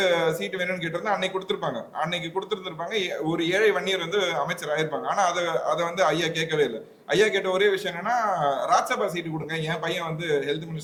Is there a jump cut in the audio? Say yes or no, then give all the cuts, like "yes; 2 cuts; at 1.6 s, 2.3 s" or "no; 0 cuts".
no; 0 cuts